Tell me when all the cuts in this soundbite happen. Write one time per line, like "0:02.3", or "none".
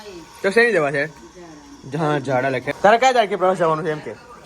0:02.7